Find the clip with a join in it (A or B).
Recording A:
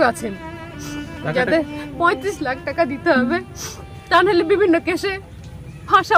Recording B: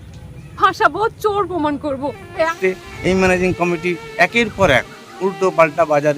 B